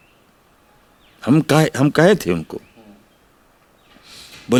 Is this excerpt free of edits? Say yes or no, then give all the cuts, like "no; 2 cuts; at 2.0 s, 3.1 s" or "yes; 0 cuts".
yes; 0 cuts